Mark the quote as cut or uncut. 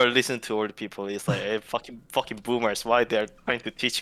uncut